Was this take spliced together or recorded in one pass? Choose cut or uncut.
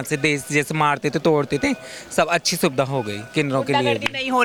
uncut